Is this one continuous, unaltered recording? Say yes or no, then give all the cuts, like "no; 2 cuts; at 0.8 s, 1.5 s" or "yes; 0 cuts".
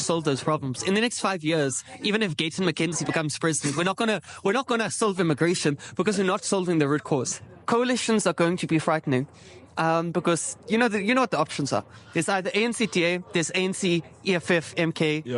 no; 1 cut; at 7.3 s